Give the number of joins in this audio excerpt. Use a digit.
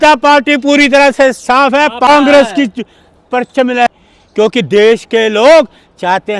0